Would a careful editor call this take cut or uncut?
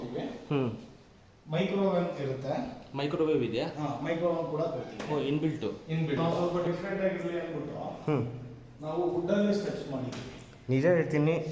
cut